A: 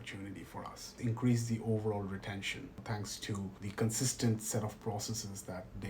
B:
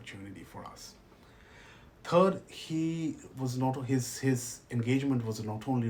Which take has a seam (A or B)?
A